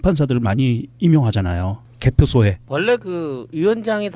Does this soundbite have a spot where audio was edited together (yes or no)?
no